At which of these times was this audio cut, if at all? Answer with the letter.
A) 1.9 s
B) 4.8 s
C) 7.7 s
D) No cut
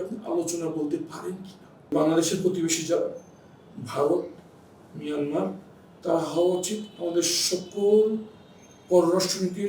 A